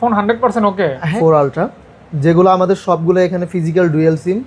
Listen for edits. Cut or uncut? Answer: cut